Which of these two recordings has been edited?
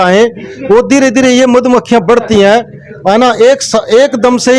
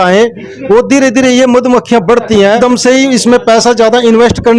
second; 1 cut; at 2.6 s

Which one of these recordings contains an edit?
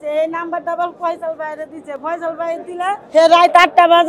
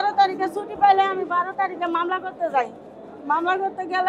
first; 1 cut; at 3.0 s

